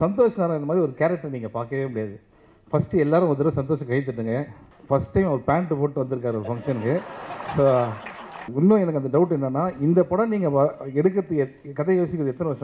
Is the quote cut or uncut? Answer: cut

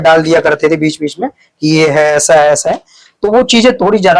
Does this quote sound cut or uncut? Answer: uncut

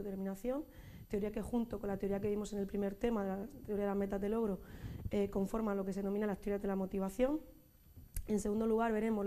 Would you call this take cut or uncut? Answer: uncut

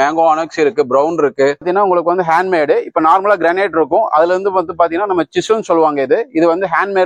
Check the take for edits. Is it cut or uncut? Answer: cut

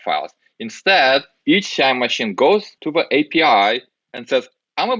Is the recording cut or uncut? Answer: cut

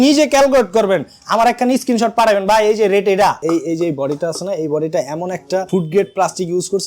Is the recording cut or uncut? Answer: cut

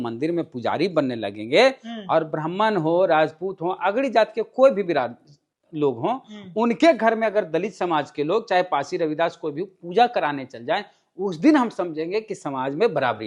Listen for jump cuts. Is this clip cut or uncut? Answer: uncut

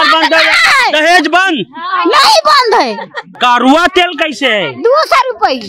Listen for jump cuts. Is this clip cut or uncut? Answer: cut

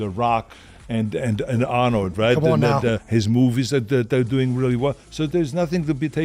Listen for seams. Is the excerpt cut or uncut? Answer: uncut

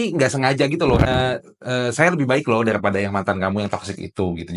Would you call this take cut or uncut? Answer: cut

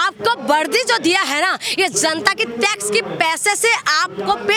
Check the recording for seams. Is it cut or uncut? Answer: uncut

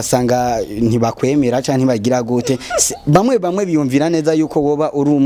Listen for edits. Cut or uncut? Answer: uncut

